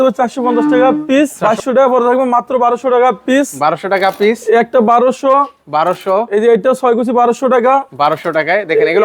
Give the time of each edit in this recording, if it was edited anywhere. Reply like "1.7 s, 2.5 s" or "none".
1.4 s